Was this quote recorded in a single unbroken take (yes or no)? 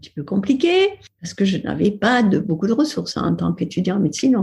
no